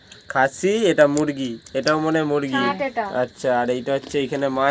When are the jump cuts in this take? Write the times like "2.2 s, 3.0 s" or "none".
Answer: none